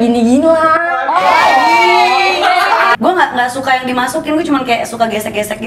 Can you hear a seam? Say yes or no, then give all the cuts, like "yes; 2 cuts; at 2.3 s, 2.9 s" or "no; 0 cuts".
yes; 1 cut; at 3.0 s